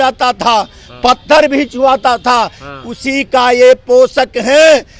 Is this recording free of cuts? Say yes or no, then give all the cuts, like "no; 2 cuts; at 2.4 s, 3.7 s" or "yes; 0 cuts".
yes; 0 cuts